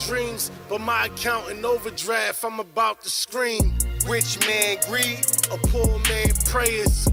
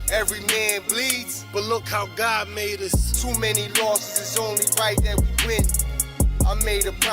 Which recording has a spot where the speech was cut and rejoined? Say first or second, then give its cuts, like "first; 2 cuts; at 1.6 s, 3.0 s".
second; 1 cut; at 4.5 s